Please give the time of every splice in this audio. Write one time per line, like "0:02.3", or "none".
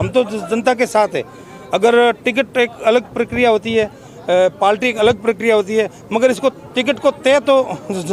none